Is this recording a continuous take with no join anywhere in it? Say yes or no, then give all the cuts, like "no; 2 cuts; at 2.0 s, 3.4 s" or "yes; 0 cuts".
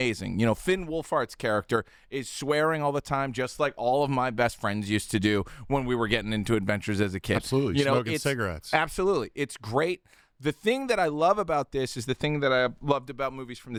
yes; 0 cuts